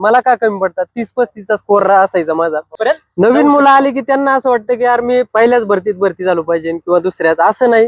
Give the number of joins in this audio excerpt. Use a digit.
1